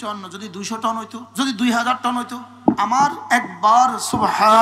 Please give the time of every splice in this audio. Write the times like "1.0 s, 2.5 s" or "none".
1.2 s